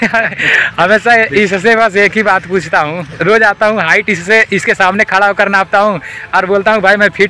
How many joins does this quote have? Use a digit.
0